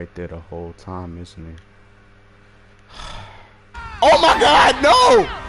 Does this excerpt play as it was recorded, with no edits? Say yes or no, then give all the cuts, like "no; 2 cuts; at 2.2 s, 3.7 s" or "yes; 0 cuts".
no; 1 cut; at 4.0 s